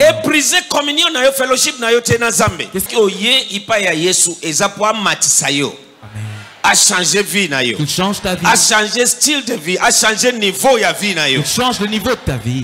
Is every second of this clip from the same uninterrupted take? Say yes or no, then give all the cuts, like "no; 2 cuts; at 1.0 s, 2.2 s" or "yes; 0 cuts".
no; 1 cut; at 2.8 s